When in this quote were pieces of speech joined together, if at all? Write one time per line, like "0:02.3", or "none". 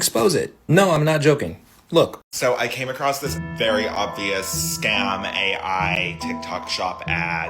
0:02.2